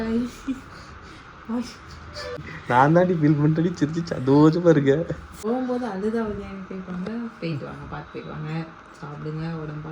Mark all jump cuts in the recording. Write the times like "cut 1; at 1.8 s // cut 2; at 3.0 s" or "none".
cut 1; at 2.5 s // cut 2; at 5.3 s